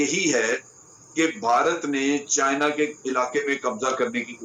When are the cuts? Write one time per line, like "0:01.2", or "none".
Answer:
none